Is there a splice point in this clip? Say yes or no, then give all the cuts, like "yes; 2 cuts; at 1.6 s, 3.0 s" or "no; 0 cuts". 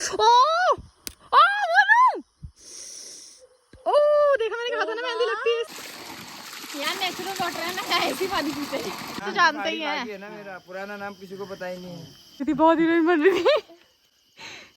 yes; 3 cuts; at 5.7 s, 9.2 s, 12.4 s